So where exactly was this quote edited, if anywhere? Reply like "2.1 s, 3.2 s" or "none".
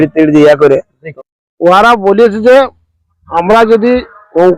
1.0 s